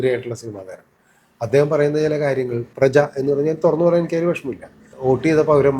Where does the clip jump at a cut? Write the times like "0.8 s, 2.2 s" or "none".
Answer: 4.8 s